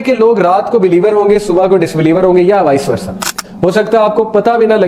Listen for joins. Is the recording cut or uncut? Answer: cut